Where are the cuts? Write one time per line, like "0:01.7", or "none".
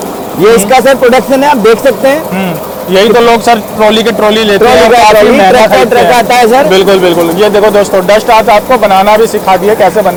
none